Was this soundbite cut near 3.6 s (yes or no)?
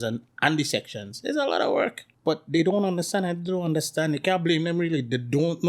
no